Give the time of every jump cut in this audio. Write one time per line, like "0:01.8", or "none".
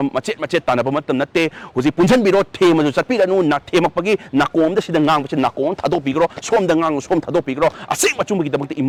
none